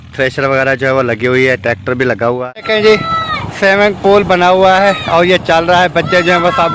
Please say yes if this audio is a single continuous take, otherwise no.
no